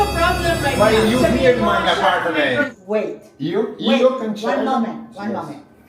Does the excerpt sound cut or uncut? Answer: cut